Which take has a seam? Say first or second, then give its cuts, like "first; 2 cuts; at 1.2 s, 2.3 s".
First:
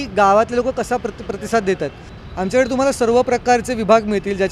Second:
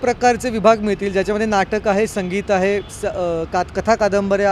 first; 1 cut; at 2.1 s